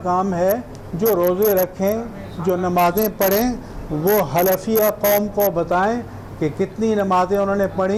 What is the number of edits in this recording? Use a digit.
0